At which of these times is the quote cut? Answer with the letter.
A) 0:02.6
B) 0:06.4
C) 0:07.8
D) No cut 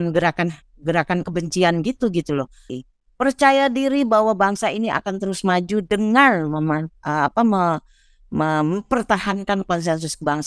A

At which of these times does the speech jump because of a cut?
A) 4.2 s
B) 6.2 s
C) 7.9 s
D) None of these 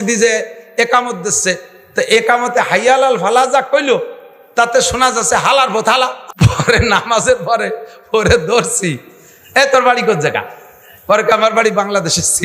B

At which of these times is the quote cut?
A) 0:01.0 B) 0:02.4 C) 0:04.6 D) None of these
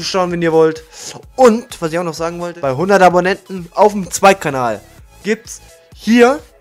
B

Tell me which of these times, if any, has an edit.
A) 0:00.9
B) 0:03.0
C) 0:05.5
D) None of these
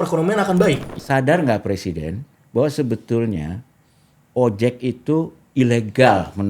A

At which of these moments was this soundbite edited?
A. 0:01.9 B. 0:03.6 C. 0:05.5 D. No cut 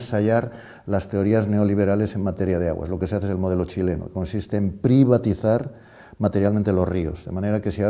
C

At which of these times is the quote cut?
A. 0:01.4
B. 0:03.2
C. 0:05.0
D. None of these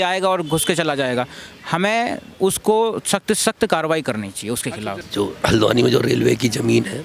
C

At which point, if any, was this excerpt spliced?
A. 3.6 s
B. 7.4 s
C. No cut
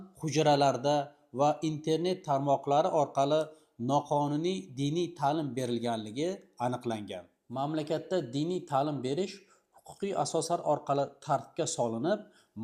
B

